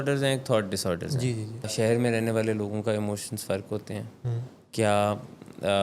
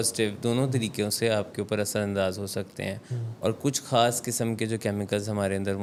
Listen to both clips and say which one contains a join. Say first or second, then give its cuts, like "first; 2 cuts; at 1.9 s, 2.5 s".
first; 1 cut; at 1.7 s